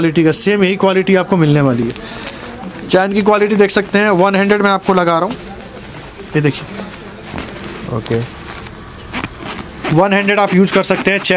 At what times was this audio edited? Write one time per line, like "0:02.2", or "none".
none